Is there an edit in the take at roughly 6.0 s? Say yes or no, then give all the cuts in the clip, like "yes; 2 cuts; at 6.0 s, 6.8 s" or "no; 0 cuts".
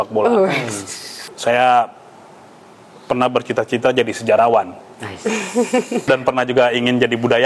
yes; 2 cuts; at 1.2 s, 6.0 s